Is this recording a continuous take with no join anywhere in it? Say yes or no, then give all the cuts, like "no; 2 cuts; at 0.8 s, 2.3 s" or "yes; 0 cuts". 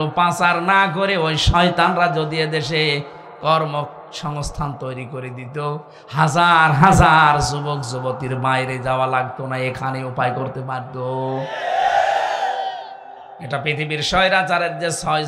no; 1 cut; at 13.1 s